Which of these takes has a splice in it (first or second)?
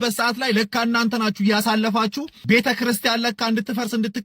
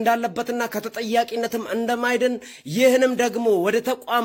first